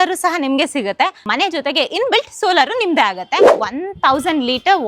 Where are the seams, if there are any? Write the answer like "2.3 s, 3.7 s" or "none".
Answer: 1.2 s, 3.6 s

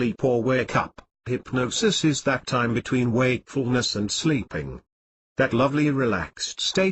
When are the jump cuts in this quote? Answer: none

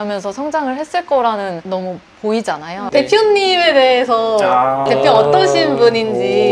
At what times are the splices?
2.8 s

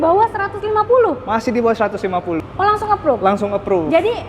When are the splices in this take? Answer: 2.5 s

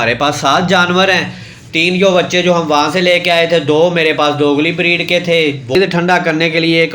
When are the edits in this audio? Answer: 5.8 s

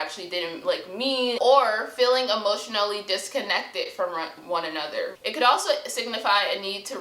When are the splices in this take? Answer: 1.4 s, 5.2 s

